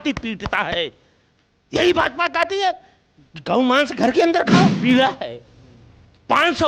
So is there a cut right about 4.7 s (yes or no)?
yes